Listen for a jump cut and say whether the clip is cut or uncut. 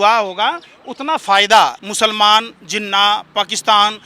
cut